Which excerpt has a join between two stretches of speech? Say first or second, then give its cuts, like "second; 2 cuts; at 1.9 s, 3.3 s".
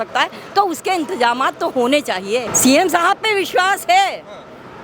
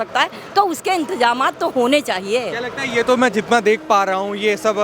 first; 1 cut; at 2.5 s